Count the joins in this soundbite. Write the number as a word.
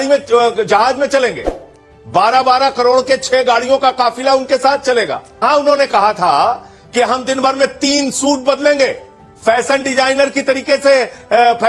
one